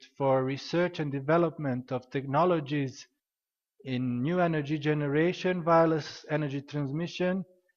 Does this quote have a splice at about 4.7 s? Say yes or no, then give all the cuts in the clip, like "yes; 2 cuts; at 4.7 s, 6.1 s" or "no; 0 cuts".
no; 1 cut; at 1.6 s